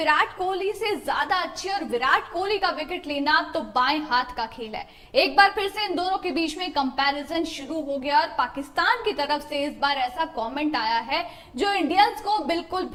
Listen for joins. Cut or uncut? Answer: uncut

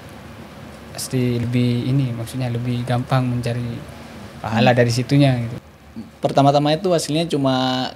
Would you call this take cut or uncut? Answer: cut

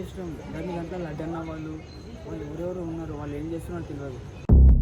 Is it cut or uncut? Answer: uncut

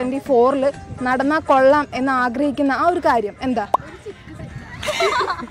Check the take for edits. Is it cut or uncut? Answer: uncut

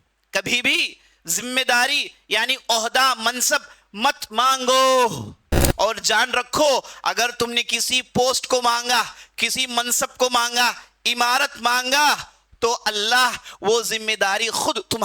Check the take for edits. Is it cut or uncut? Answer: cut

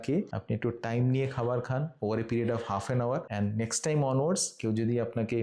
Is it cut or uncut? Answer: cut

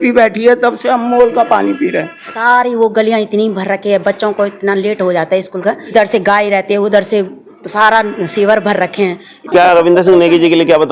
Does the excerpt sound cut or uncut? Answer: cut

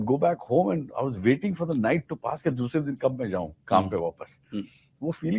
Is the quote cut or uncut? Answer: uncut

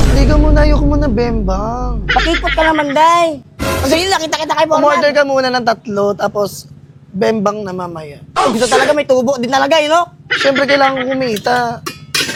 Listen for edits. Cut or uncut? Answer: uncut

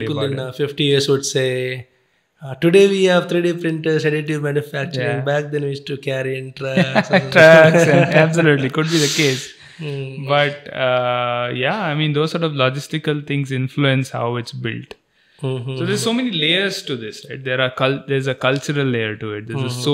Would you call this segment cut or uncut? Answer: uncut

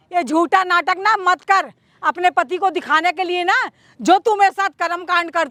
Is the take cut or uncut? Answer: uncut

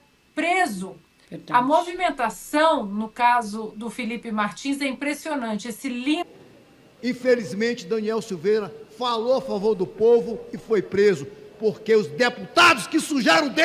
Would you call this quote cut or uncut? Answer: cut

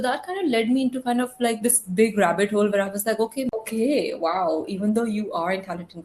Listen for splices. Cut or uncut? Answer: cut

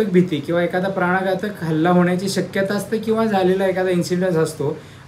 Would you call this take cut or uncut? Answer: uncut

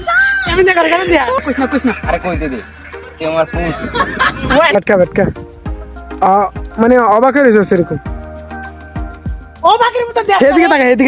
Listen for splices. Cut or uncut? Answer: cut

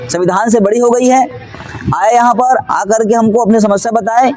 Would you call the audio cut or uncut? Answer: uncut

